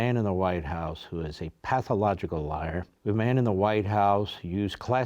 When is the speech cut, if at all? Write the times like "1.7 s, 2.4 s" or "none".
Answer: 2.9 s